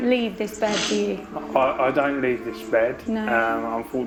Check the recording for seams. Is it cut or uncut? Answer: uncut